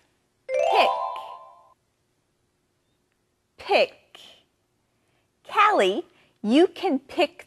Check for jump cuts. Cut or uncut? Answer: cut